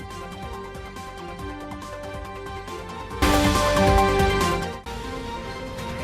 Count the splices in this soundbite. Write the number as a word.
one